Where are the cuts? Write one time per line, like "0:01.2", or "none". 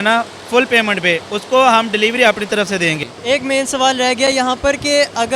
0:03.1